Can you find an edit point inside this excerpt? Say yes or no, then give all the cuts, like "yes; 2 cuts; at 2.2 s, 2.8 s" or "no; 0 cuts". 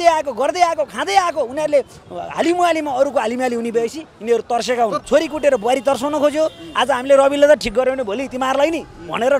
yes; 1 cut; at 5.0 s